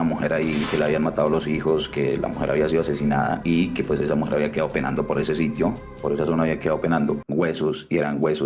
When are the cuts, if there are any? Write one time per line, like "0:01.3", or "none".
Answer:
0:07.2